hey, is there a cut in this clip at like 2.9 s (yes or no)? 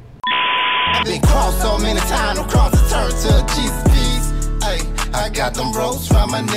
no